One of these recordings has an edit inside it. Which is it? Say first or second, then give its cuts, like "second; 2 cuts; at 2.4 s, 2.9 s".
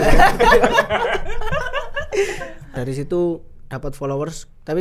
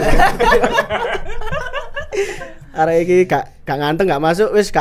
first; 1 cut; at 2.7 s